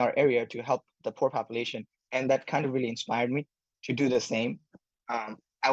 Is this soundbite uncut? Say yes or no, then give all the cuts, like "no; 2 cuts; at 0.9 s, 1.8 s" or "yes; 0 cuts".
yes; 0 cuts